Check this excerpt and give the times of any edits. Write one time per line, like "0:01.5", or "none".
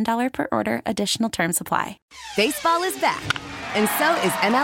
0:02.0